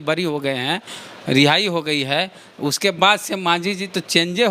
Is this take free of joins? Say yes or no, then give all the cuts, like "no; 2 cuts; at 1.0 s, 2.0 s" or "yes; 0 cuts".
yes; 0 cuts